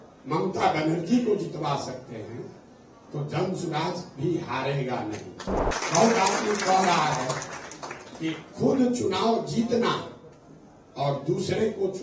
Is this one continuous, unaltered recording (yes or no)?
no